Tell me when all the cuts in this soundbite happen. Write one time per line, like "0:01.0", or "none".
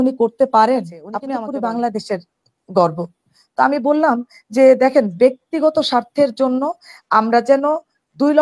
0:01.1

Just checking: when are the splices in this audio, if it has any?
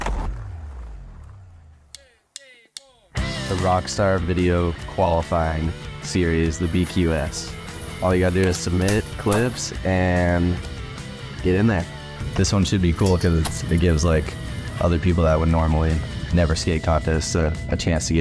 0:01.8

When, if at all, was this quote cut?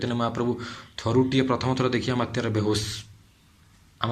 none

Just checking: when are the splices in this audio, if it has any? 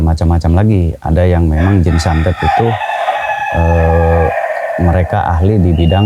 none

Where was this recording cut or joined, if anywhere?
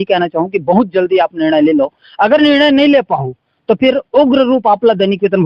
none

